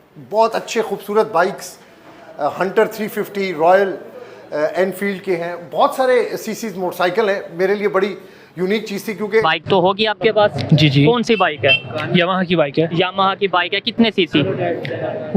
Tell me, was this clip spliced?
yes; 1 cut; at 9.4 s

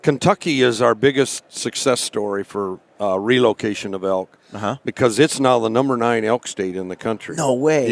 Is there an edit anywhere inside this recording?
no; 0 cuts

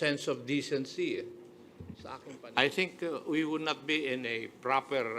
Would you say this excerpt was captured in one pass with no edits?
no; 1 cut; at 2.1 s

